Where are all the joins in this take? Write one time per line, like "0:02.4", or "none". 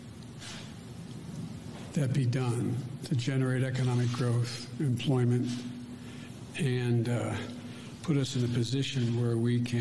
none